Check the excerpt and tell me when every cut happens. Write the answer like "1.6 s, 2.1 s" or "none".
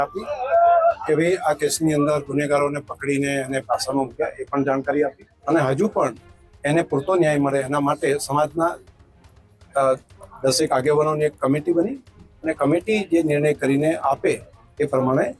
5.3 s